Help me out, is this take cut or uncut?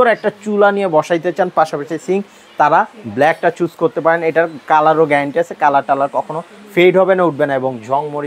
uncut